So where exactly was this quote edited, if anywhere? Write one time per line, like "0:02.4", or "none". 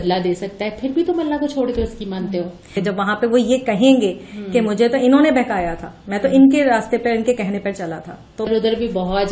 0:02.7
0:08.5